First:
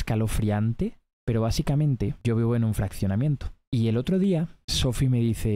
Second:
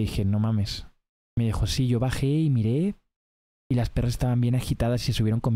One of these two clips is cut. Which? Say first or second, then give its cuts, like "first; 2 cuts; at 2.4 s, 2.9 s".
first; 4 cuts; at 1.1 s, 2.2 s, 3.5 s, 4.6 s